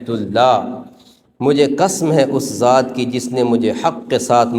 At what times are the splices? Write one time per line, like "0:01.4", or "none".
none